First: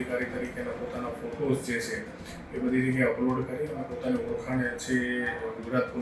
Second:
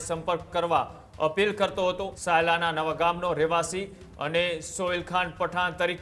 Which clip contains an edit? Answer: second; 1 cut; at 2.1 s

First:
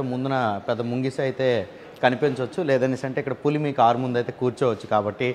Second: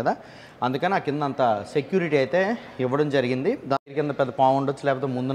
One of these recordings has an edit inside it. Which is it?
second; 1 cut; at 3.8 s

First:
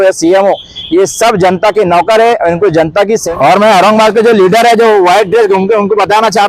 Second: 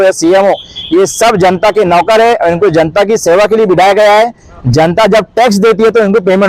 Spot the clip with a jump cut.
first; 1 cut; at 3.2 s

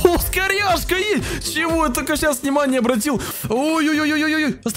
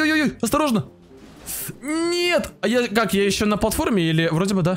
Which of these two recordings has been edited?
first; 1 cut; at 3.3 s

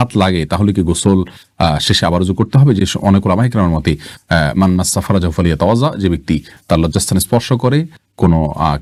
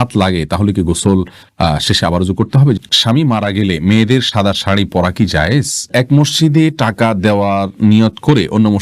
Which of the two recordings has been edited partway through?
second; 2 cuts; at 2.8 s, 5.9 s

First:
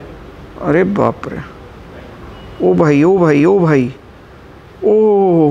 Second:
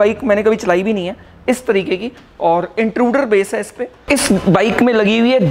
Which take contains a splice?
second; 1 cut; at 3.9 s

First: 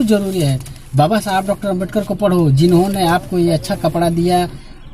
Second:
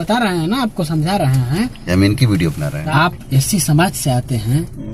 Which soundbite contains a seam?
second; 1 cut; at 2.7 s

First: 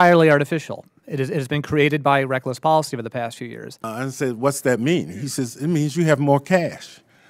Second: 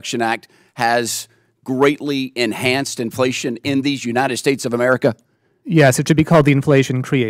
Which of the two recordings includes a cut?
first; 1 cut; at 3.9 s

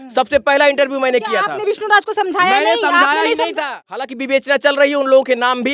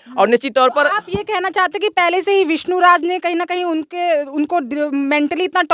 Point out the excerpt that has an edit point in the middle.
first; 1 cut; at 3.8 s

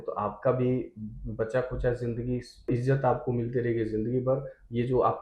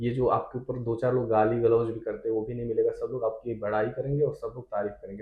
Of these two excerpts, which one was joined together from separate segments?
first; 1 cut; at 2.7 s

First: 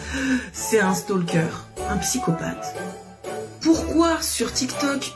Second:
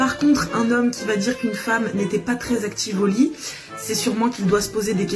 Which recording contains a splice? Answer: first; 1 cut; at 1.7 s

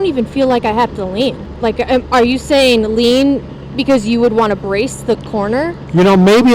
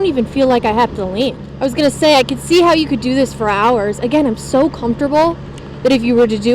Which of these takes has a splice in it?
second; 1 cut; at 1.4 s

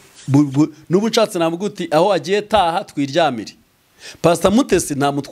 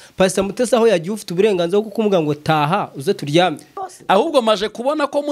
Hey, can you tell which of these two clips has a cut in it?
second; 1 cut; at 3.8 s

